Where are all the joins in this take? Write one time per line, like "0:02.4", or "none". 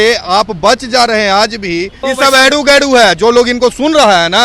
0:02.0